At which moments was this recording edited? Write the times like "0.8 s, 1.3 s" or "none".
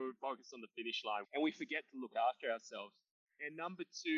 1.2 s, 3.3 s